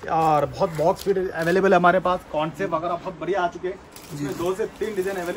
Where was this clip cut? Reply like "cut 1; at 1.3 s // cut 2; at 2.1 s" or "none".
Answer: none